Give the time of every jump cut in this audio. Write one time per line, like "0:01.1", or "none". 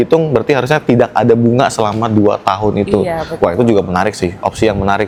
none